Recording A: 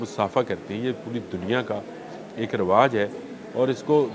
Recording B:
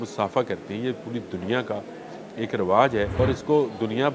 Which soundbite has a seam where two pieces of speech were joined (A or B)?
B